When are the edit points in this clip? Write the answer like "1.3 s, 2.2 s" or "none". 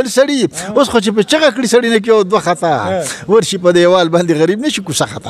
none